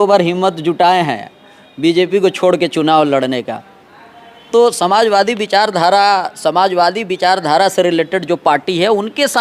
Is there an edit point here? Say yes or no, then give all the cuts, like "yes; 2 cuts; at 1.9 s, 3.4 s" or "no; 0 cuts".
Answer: no; 0 cuts